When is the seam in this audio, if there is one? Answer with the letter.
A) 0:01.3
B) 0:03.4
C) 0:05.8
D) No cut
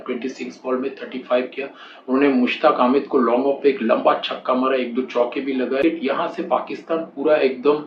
C